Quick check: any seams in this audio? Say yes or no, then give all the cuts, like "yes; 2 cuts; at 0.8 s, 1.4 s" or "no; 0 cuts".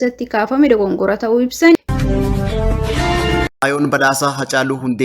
yes; 2 cuts; at 1.9 s, 3.5 s